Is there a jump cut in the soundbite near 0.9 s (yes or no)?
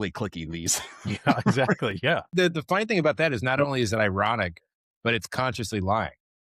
no